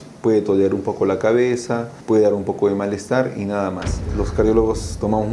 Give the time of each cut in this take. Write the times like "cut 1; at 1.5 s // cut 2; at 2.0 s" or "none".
cut 1; at 1.9 s // cut 2; at 4.1 s